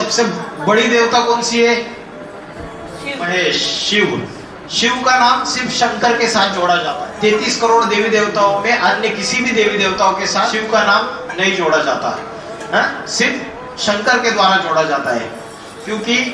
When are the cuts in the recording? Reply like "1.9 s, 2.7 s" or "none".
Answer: 3.3 s, 6.9 s, 10.5 s